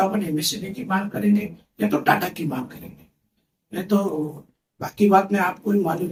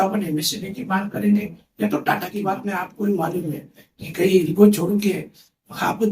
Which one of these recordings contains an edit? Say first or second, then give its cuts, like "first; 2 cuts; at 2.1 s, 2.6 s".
second; 1 cut; at 2.3 s